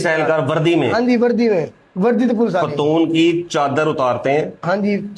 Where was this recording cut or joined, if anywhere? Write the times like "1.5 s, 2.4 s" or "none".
1.8 s